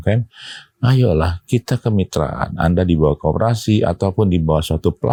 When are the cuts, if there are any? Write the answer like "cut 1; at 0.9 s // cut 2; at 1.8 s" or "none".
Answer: none